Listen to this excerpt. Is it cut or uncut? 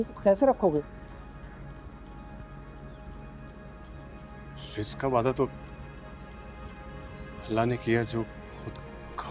uncut